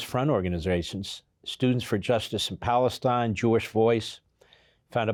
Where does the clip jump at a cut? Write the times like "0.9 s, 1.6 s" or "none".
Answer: none